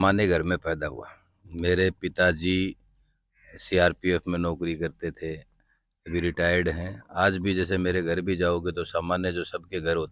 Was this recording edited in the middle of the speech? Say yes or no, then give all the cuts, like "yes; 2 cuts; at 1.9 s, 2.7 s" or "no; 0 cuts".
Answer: no; 0 cuts